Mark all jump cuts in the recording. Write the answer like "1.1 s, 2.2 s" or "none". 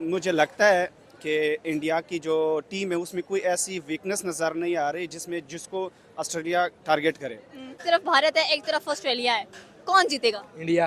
7.8 s

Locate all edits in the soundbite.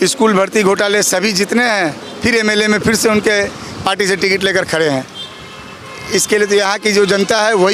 none

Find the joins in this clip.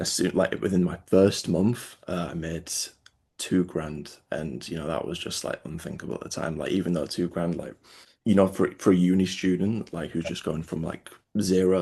none

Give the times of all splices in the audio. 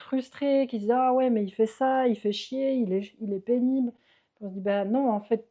none

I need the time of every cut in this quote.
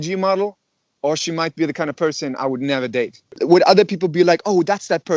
3.3 s

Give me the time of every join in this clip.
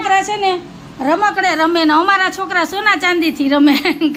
none

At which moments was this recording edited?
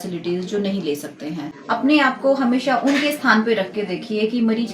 1.5 s

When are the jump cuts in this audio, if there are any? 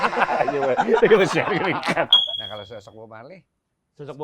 2.2 s

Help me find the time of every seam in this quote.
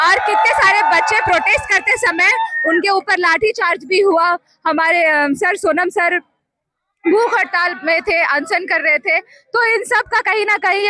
none

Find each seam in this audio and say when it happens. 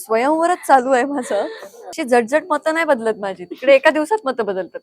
1.8 s

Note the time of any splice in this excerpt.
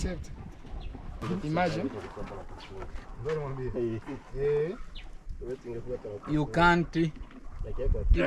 1.2 s

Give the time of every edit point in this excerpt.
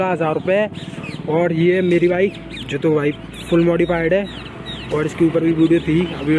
none

